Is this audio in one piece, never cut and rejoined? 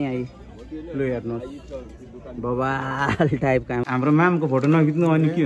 no; 1 cut; at 3.8 s

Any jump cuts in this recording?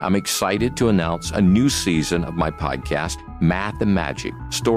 no; 0 cuts

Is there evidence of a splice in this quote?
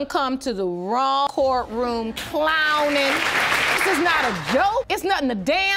yes; 1 cut; at 1.3 s

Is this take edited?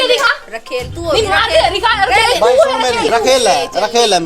yes; 1 cut; at 3.1 s

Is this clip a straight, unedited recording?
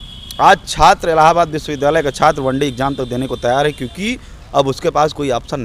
yes; 0 cuts

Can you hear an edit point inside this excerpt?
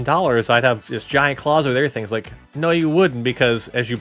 no; 0 cuts

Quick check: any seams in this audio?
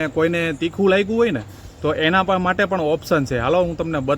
no; 0 cuts

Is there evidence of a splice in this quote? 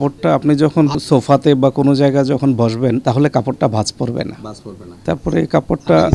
yes; 2 cuts; at 1.0 s, 3.0 s

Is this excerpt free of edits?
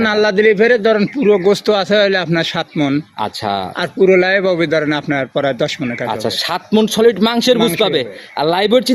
yes; 0 cuts

